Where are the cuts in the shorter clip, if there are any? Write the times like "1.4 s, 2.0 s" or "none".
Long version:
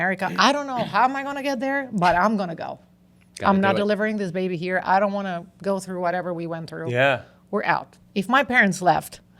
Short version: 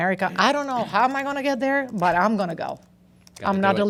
none